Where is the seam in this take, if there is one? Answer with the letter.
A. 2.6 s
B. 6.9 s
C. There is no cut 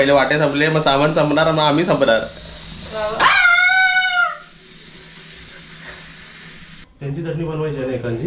B